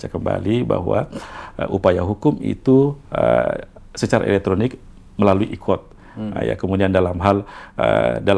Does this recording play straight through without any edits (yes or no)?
yes